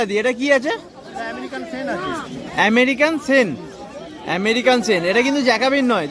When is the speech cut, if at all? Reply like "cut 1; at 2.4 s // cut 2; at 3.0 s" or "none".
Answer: none